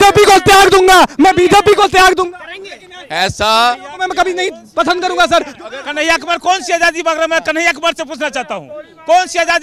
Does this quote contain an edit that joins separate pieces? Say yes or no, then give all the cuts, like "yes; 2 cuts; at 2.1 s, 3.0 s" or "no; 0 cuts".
no; 0 cuts